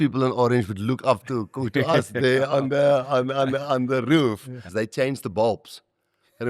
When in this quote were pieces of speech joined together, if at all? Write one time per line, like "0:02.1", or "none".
0:04.6